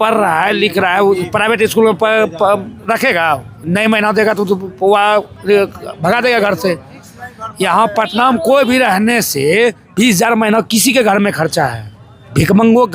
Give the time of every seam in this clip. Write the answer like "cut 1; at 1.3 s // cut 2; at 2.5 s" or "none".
none